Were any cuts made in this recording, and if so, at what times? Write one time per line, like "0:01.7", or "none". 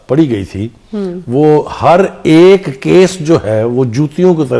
none